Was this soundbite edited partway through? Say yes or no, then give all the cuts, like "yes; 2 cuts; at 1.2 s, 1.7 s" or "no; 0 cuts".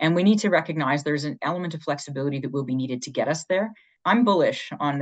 yes; 1 cut; at 4.0 s